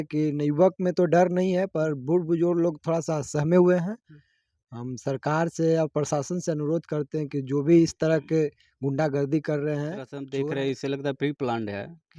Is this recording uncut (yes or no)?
no